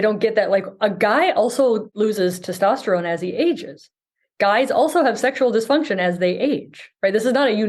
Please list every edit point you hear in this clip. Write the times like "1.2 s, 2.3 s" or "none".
1.9 s